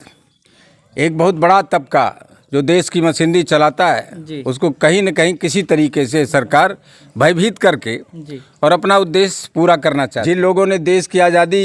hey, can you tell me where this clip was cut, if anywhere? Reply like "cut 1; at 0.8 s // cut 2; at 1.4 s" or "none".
cut 1; at 10.2 s